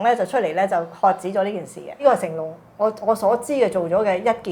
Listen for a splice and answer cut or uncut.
cut